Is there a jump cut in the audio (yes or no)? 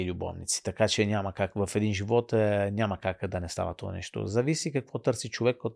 no